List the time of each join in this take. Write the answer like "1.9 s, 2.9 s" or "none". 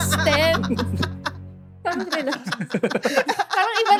none